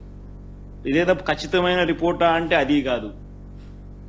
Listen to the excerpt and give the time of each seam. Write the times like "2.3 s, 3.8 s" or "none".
3.1 s